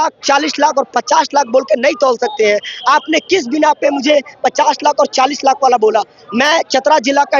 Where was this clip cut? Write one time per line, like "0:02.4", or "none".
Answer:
none